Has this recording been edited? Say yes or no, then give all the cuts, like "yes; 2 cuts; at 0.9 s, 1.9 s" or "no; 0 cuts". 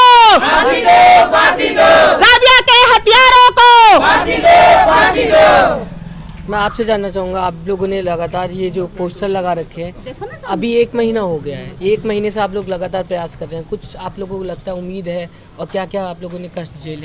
no; 0 cuts